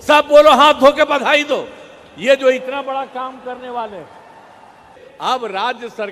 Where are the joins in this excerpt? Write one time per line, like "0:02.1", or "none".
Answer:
0:05.0